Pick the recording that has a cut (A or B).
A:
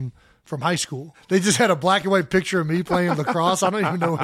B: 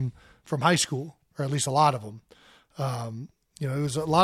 A